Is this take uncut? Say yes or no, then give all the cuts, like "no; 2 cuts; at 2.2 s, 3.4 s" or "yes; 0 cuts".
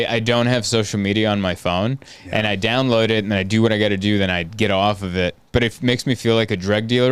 yes; 0 cuts